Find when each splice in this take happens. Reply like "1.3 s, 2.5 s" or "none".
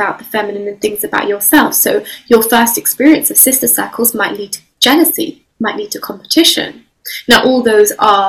none